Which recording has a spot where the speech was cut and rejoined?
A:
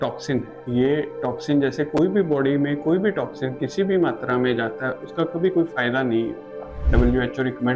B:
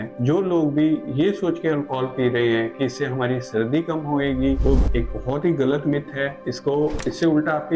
A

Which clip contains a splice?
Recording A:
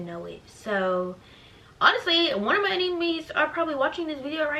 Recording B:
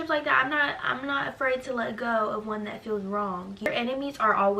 B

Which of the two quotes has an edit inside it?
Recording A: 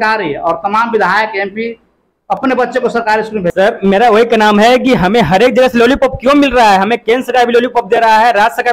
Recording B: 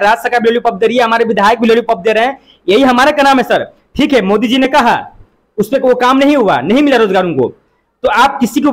A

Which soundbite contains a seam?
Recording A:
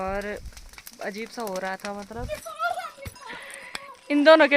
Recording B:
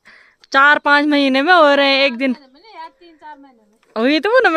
A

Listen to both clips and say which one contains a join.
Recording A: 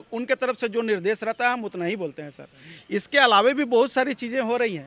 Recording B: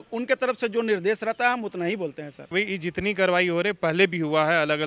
B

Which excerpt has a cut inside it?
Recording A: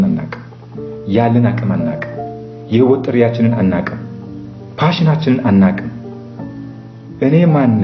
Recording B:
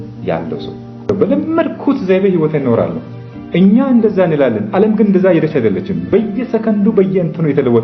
B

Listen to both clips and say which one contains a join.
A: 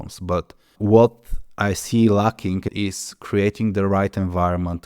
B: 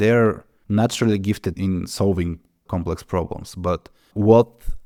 A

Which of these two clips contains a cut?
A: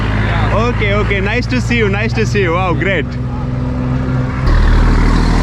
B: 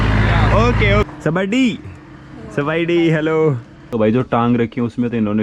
B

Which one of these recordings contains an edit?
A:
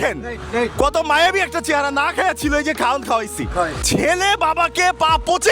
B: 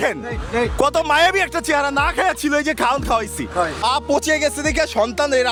A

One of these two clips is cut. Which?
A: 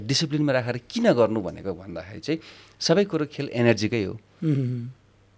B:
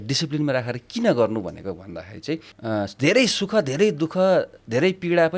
B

